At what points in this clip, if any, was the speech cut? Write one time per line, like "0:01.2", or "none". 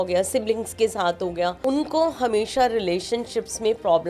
0:01.6